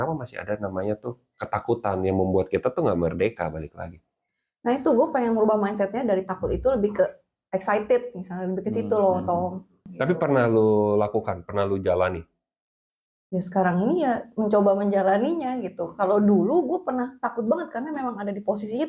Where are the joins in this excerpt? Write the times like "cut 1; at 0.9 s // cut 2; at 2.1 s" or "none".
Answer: cut 1; at 9.9 s